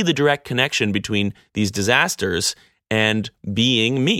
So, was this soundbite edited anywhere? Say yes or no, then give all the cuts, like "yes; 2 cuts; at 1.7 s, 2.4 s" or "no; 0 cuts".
no; 0 cuts